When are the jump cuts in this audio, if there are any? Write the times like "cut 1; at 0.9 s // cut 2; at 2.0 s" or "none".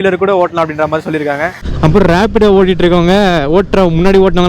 cut 1; at 1.7 s

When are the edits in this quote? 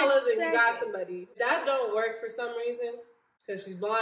cut 1; at 1.3 s

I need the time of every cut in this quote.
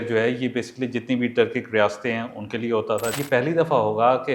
cut 1; at 3.2 s

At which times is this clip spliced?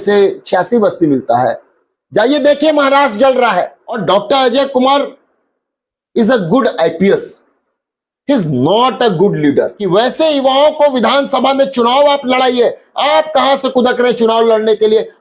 cut 1; at 4.0 s // cut 2; at 9.8 s

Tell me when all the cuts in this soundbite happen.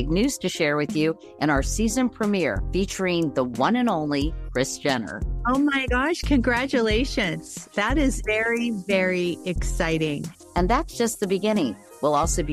none

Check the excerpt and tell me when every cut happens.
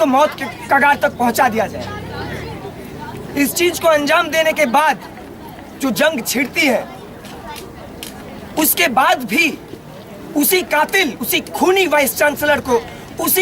cut 1; at 5.2 s

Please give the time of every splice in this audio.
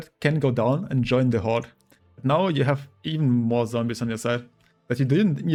none

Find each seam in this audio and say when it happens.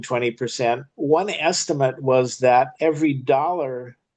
cut 1; at 0.9 s // cut 2; at 2.7 s

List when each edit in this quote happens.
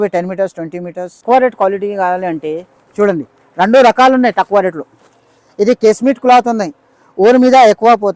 cut 1; at 1.2 s

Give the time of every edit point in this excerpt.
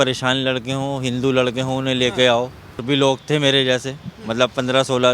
cut 1; at 2.8 s

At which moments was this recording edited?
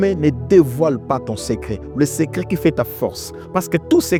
none

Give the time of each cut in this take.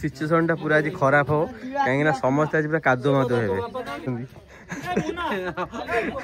cut 1; at 4.1 s

